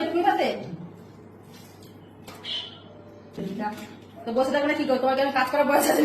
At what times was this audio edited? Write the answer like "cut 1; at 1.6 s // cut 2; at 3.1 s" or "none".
cut 1; at 3.4 s